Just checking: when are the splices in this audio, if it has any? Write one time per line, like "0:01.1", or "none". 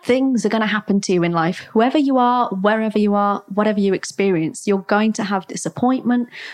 0:01.6